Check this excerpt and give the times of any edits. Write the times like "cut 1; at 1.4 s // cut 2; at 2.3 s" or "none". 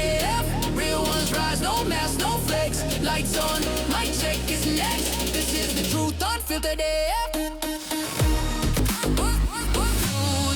none